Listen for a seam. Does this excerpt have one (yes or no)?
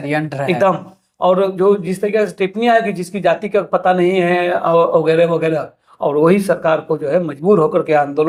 no